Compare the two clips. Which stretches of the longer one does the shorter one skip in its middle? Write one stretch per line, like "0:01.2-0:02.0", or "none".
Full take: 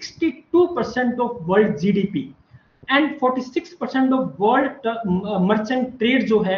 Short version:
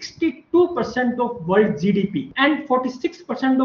0:02.3-0:02.8